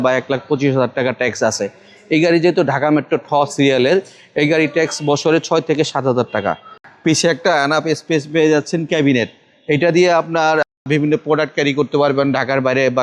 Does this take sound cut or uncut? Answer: cut